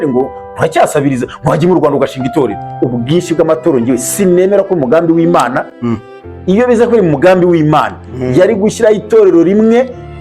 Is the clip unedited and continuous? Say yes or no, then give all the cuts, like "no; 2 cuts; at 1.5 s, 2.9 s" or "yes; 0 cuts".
no; 1 cut; at 2.6 s